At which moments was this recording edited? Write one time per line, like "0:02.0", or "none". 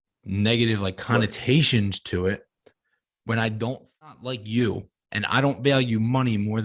0:04.1